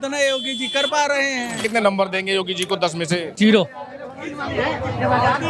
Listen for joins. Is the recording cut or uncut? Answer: cut